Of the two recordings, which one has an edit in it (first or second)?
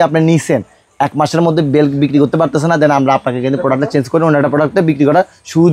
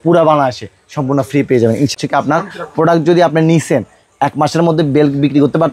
second